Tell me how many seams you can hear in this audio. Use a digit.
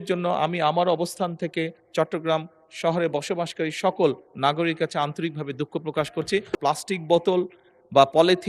1